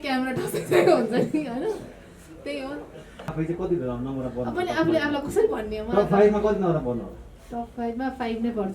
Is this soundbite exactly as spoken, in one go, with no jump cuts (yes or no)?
no